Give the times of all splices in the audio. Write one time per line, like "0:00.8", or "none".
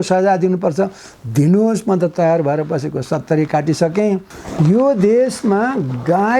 0:04.4